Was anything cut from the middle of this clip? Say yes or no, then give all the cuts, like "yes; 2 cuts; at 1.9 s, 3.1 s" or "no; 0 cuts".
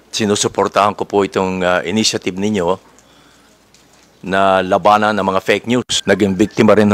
yes; 1 cut; at 5.9 s